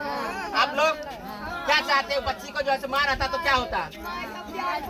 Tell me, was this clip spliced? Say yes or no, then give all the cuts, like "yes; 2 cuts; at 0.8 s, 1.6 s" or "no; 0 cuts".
no; 0 cuts